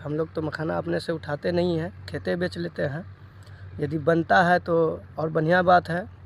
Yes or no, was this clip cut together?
no